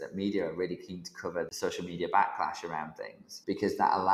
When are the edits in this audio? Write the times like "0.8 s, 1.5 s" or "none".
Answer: 1.5 s, 3.4 s